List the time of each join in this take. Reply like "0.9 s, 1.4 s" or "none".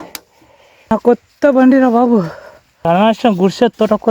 0.9 s, 2.9 s